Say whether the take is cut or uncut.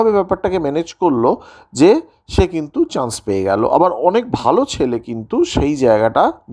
uncut